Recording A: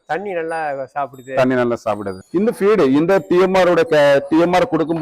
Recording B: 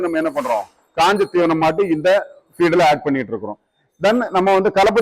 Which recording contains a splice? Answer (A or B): A